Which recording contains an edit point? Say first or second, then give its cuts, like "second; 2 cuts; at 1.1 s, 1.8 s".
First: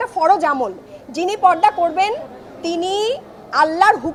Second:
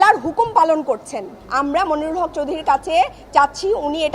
second; 1 cut; at 1.4 s